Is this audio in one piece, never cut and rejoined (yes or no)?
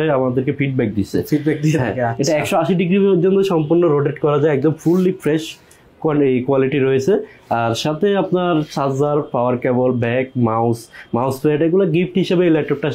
yes